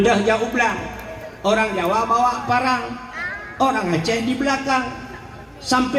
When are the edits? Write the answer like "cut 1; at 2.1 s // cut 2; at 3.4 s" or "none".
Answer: none